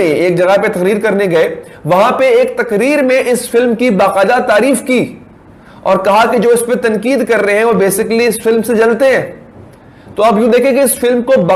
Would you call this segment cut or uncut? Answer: uncut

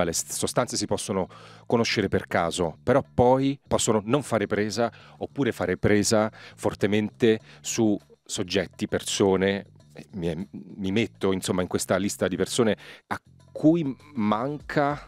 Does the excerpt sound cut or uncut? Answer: cut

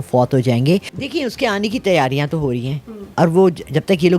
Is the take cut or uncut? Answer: cut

